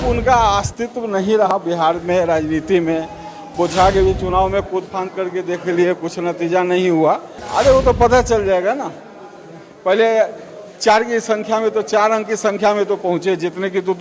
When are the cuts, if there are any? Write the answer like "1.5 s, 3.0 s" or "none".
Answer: 1.5 s, 7.3 s